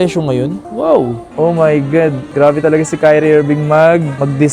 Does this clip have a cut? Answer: yes; 1 cut; at 1.2 s

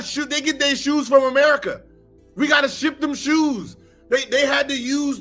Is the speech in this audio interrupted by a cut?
no; 0 cuts

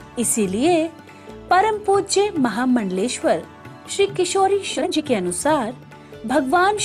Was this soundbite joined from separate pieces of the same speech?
yes; 1 cut; at 4.8 s

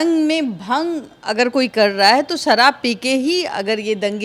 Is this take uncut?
yes; 0 cuts

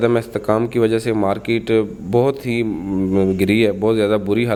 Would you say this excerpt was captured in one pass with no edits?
yes; 0 cuts

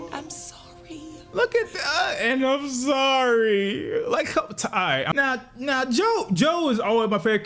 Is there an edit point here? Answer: yes; 1 cut; at 5.1 s

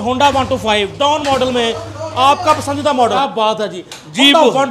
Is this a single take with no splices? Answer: no; 1 cut; at 3.2 s

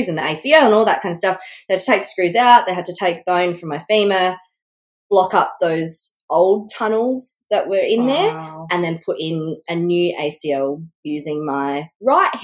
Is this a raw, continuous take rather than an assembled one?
yes; 0 cuts

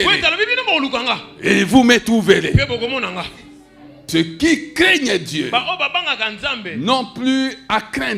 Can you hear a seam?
yes; 1 cut; at 4.0 s

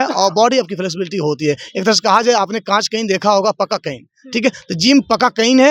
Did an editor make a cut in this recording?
no; 0 cuts

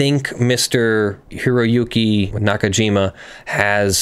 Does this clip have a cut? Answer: yes; 2 cuts; at 1.3 s, 2.3 s

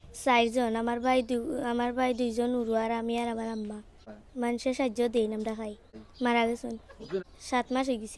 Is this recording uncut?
no; 3 cuts; at 4.1 s, 6.0 s, 7.2 s

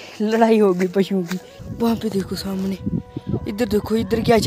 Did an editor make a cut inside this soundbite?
yes; 2 cuts; at 1.6 s, 3.1 s

